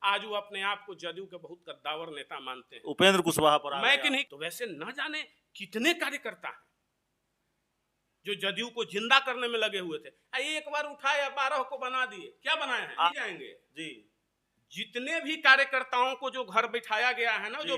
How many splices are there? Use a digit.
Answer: 2